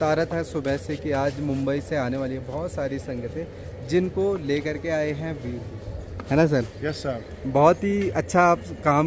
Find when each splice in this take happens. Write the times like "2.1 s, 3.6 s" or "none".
none